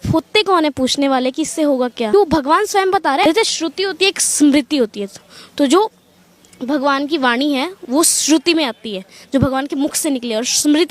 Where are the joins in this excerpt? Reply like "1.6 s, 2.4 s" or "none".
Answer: 2.1 s, 3.2 s